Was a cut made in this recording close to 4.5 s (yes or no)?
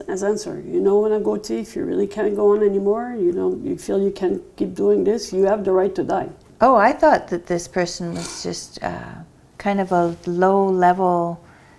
no